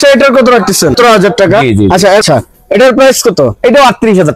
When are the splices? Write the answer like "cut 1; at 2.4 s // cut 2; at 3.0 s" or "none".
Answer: cut 1; at 0.9 s // cut 2; at 2.2 s